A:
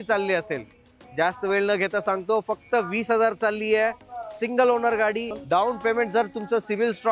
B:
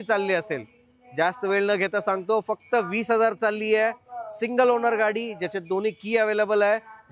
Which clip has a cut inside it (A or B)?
A